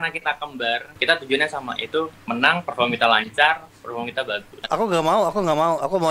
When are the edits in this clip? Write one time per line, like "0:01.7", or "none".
0:00.9
0:04.6